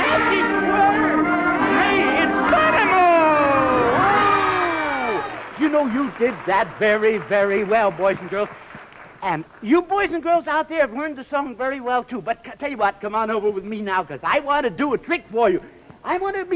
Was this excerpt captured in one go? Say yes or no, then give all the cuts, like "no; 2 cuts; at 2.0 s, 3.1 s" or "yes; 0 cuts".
no; 1 cut; at 14.2 s